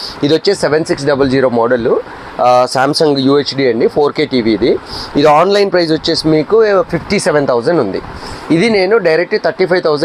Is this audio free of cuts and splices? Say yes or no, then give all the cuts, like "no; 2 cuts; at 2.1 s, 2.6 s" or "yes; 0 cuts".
yes; 0 cuts